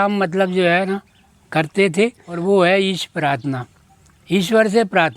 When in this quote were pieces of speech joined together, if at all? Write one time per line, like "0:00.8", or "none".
0:02.3